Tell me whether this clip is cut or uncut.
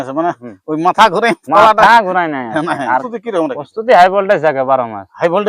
cut